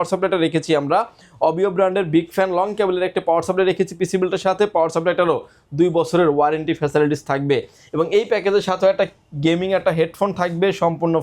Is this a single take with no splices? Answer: yes; 0 cuts

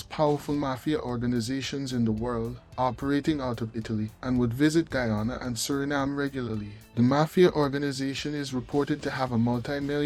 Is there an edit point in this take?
no; 0 cuts

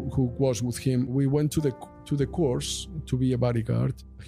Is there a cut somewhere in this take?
no; 0 cuts

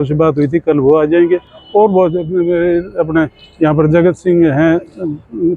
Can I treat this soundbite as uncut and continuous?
yes; 0 cuts

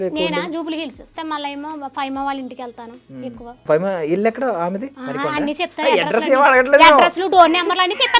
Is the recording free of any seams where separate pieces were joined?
no; 3 cuts; at 1.2 s, 3.6 s, 5.0 s

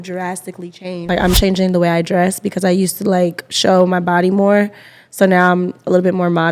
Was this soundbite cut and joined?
yes; 1 cut; at 1.3 s

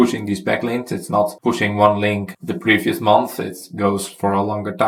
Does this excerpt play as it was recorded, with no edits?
yes; 0 cuts

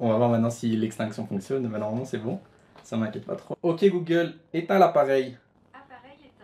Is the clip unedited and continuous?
no; 2 cuts; at 3.5 s, 5.6 s

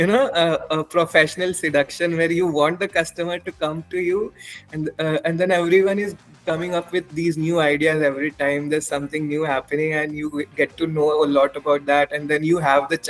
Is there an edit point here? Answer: no; 0 cuts

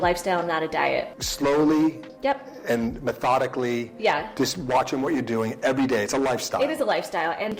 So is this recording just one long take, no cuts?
no; 1 cut; at 1.2 s

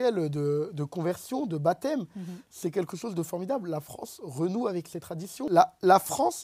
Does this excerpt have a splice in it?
yes; 1 cut; at 5.5 s

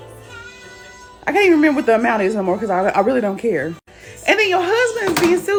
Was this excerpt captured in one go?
yes; 0 cuts

